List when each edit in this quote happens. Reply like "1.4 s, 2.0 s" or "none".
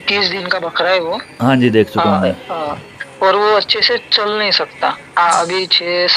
none